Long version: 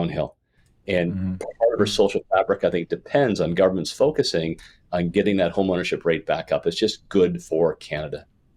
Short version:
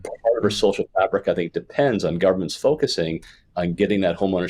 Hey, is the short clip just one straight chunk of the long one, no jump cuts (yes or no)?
yes